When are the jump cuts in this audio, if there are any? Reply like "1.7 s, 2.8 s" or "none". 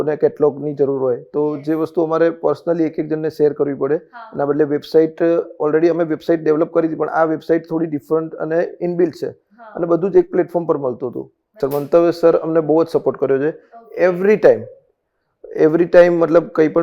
11.6 s